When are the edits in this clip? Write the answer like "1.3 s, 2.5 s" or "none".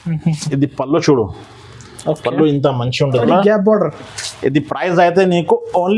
3.2 s